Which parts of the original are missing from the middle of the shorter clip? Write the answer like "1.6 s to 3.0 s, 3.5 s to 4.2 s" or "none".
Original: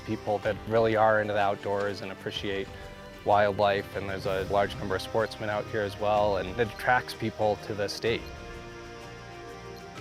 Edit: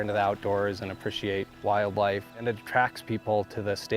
2.7 s to 3.1 s, 4.0 s to 6.5 s